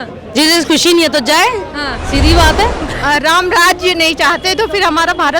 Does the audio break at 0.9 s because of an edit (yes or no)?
no